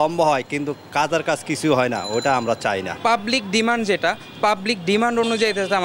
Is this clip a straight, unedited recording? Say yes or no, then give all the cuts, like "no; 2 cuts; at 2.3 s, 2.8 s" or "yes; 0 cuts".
no; 1 cut; at 2.9 s